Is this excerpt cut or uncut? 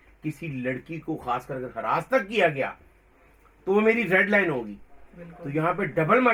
uncut